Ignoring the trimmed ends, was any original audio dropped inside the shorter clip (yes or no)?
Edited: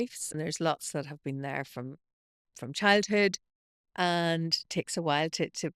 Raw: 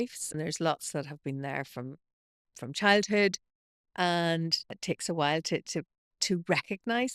yes